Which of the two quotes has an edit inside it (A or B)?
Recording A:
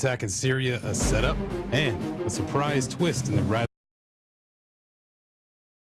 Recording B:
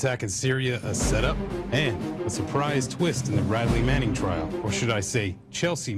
B